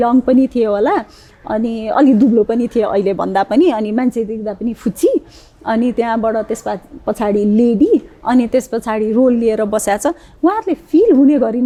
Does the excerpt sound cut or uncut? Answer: uncut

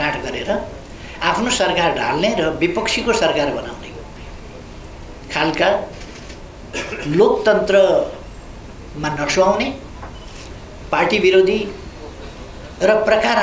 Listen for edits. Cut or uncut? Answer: uncut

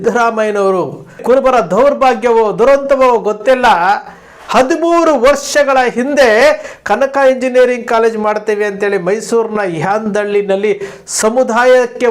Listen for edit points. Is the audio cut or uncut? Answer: cut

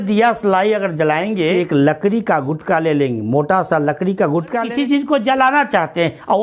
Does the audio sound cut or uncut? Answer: cut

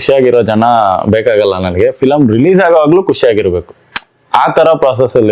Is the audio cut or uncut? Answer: uncut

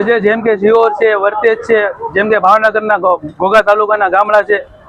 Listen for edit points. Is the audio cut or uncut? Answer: uncut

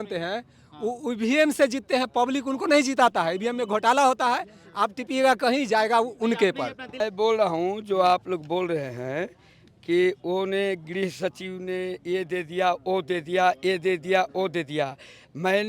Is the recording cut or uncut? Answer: uncut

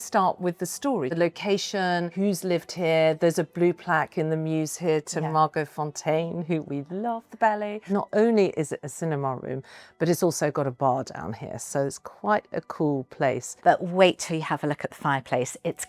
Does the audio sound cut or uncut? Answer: cut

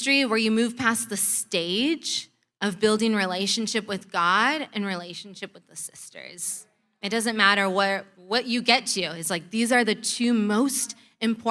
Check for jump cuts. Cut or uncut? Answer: uncut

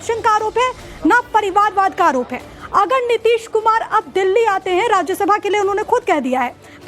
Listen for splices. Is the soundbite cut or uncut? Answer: cut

